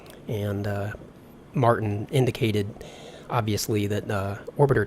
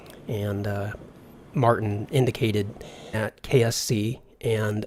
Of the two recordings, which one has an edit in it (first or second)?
first